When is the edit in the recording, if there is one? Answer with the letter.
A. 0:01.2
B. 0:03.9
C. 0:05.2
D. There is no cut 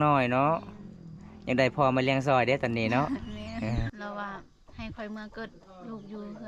B